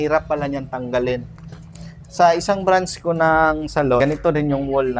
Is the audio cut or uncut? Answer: cut